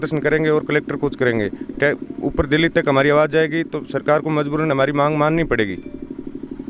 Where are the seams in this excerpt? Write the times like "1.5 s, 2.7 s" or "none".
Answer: none